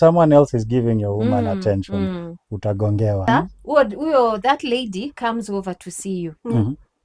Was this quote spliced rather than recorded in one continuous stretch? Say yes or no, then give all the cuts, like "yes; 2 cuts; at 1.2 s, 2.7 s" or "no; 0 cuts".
yes; 1 cut; at 3.3 s